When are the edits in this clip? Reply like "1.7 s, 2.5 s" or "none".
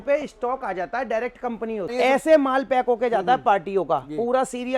1.9 s